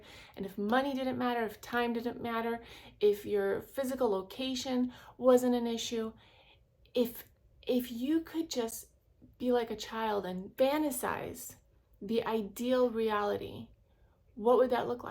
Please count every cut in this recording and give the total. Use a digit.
1